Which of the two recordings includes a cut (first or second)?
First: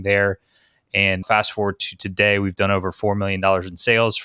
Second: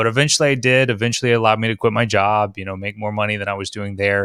first